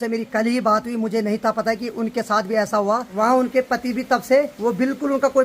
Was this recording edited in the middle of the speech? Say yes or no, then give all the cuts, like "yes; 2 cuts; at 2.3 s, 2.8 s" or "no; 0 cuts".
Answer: yes; 2 cuts; at 3.1 s, 4.5 s